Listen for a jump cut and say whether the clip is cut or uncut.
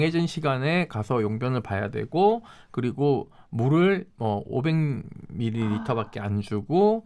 uncut